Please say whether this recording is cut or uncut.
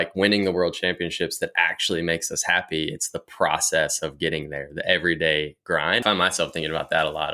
cut